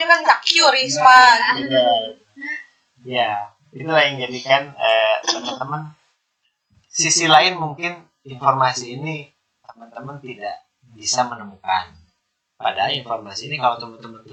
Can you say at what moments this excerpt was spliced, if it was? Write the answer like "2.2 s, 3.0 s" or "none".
none